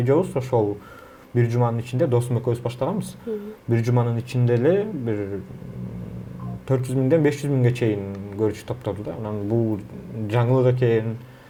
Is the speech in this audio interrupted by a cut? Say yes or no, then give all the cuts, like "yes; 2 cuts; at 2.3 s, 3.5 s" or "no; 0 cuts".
no; 0 cuts